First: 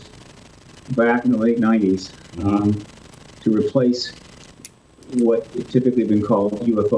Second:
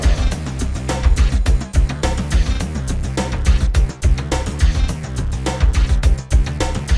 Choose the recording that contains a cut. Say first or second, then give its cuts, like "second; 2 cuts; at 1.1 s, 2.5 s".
first; 1 cut; at 1.2 s